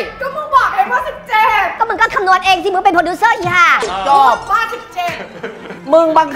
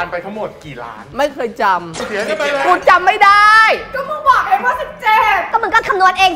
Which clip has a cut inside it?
second; 1 cut; at 2.0 s

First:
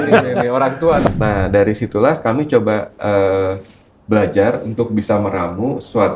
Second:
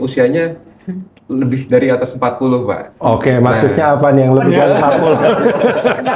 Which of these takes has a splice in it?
first; 1 cut; at 1.0 s

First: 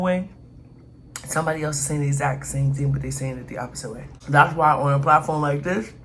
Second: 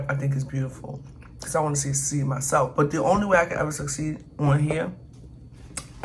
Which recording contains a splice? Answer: first; 1 cut; at 4.1 s

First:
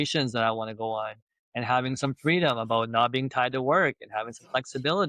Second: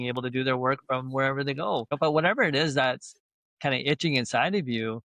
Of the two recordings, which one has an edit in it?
second; 1 cut; at 2.0 s

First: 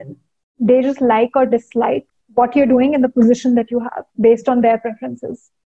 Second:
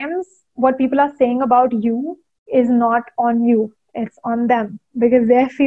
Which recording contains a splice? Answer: first; 1 cut; at 2.2 s

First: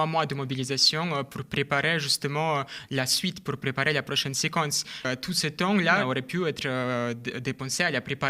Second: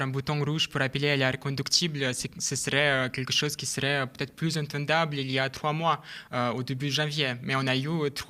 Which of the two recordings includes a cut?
first; 2 cuts; at 5.0 s, 6.0 s

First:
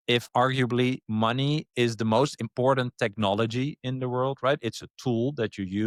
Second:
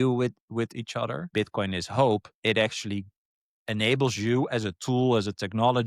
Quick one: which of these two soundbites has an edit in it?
second; 1 cut; at 1.3 s

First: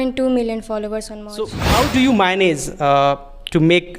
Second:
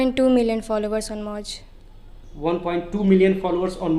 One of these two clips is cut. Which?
first; 1 cut; at 1.6 s

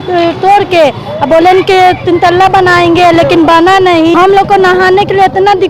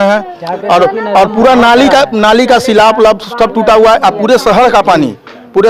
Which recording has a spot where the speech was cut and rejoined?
first; 1 cut; at 4.2 s

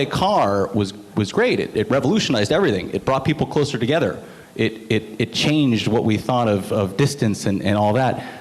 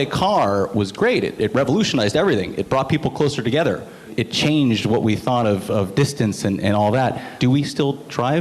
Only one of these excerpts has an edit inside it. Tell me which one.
second; 3 cuts; at 0.9 s, 4.1 s, 7.3 s

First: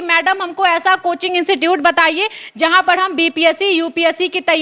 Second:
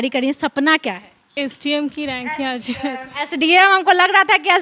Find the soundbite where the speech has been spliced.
second; 1 cut; at 1.3 s

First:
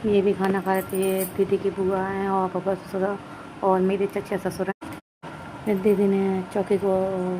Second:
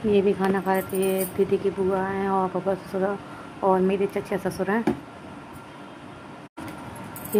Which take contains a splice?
first; 1 cut; at 4.7 s

